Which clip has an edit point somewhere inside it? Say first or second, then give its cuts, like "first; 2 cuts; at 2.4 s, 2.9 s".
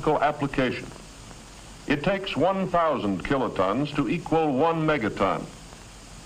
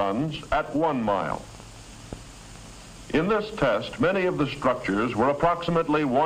first; 1 cut; at 2.0 s